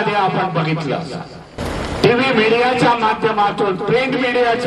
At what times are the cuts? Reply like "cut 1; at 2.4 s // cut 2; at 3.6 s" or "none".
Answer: cut 1; at 1.6 s